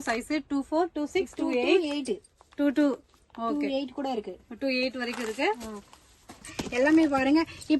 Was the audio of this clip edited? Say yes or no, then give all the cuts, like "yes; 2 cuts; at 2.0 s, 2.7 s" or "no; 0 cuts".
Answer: yes; 1 cut; at 6.4 s